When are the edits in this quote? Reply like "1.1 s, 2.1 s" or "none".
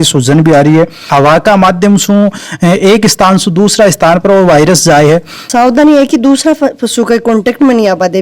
1.1 s, 5.4 s